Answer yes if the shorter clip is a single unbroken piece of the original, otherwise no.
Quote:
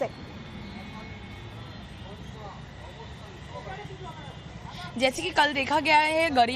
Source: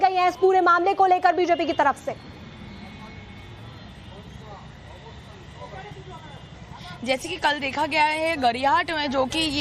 yes